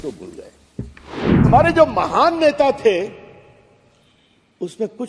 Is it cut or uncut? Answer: cut